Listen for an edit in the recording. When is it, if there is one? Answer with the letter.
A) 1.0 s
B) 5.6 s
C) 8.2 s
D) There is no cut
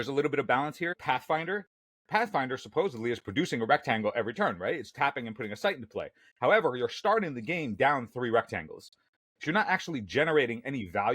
A